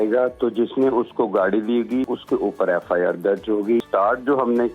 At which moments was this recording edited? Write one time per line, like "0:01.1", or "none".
0:02.1
0:03.8